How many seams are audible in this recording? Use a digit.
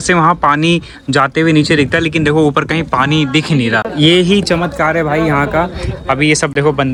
0